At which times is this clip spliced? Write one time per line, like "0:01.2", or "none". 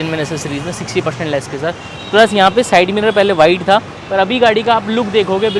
none